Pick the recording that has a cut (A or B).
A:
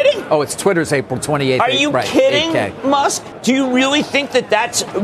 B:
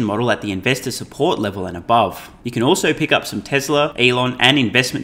B